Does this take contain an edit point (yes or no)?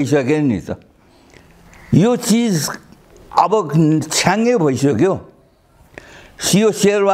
no